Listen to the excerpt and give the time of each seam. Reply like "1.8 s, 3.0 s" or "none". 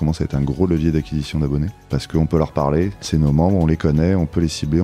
1.8 s, 3.0 s

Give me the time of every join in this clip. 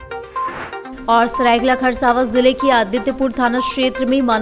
none

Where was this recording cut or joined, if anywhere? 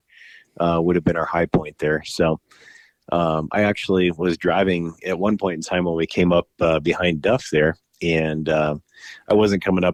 none

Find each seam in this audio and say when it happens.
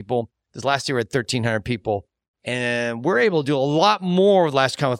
none

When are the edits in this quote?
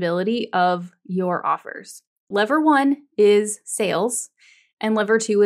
2.3 s

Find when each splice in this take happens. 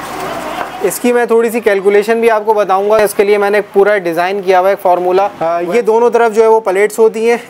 0.8 s, 3.0 s, 5.5 s

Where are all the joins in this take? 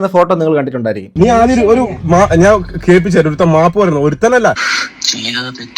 1.1 s

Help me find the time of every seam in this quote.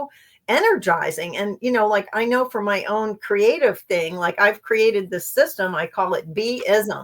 none

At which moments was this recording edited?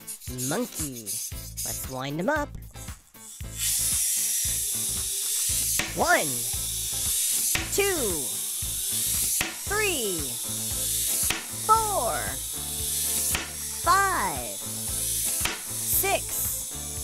11.1 s

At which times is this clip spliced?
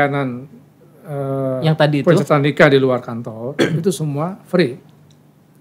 none

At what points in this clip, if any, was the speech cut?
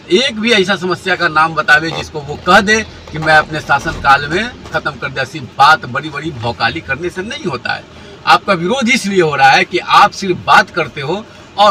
none

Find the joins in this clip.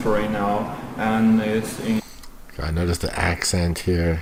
none

